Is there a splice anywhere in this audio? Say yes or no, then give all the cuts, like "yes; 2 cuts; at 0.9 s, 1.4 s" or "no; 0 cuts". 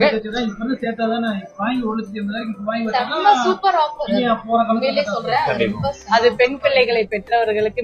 no; 0 cuts